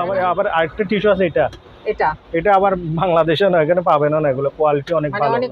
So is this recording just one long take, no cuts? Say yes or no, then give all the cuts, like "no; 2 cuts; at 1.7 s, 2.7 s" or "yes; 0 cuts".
yes; 0 cuts